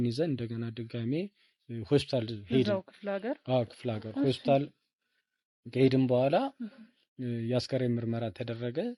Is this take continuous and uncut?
yes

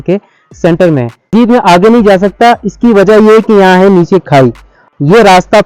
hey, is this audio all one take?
no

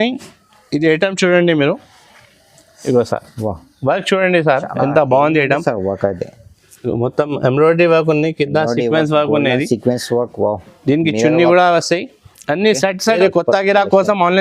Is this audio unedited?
no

